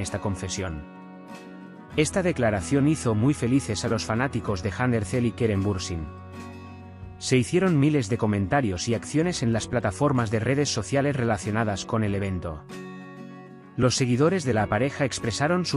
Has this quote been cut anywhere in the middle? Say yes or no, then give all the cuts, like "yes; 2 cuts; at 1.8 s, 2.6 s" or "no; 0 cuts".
yes; 2 cuts; at 6.1 s, 7.3 s